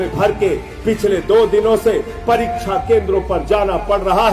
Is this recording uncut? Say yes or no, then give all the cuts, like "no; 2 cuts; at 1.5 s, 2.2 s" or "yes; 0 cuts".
yes; 0 cuts